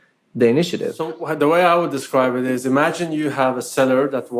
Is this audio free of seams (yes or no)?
no